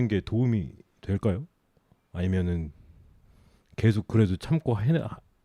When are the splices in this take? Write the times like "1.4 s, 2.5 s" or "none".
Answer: none